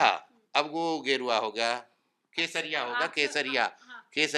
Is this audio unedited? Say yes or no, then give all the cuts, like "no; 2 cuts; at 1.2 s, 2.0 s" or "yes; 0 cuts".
yes; 0 cuts